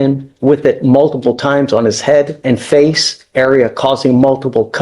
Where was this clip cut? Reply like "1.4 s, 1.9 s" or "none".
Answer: 2.4 s